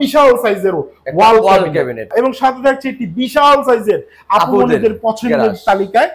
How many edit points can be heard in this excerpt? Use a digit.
1